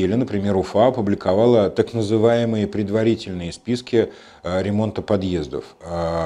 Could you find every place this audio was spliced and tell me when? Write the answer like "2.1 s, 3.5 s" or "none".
none